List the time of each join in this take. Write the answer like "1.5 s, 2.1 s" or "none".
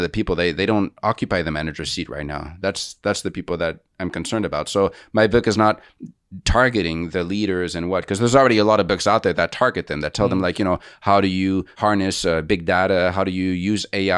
11.8 s